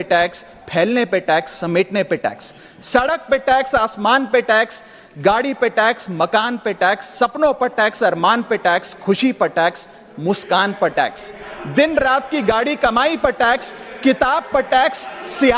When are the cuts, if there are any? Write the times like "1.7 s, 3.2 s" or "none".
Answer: none